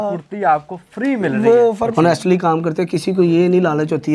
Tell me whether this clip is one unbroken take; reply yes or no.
no